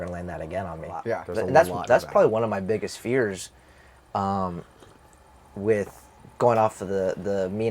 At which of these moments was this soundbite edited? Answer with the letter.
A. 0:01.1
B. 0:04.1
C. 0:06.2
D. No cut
A